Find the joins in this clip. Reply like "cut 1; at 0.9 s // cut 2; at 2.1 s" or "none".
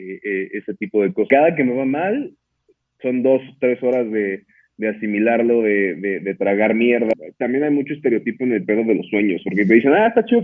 cut 1; at 1.3 s // cut 2; at 7.1 s